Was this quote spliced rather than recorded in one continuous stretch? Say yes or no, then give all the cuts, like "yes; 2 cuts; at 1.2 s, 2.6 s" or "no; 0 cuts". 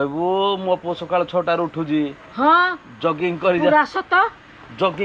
no; 0 cuts